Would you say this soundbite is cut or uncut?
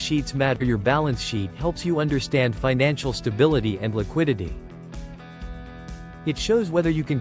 cut